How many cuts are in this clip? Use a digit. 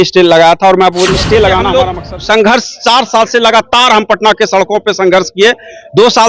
1